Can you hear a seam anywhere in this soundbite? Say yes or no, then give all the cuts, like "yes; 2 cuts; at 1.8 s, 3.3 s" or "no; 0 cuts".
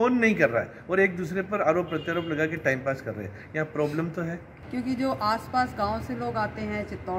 yes; 1 cut; at 4.6 s